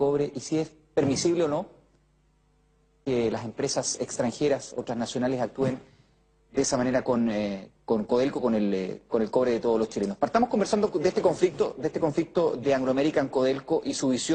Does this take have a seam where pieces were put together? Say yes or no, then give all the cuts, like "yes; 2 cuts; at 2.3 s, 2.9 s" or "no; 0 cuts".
no; 0 cuts